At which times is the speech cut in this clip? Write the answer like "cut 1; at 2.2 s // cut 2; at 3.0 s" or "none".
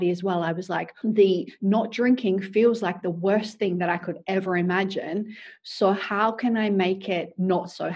cut 1; at 0.9 s